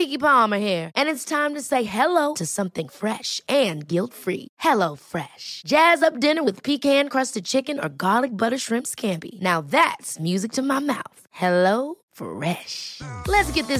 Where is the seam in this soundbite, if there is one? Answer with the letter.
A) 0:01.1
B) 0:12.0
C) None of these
C